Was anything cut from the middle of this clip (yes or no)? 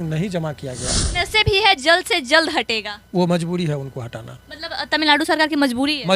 yes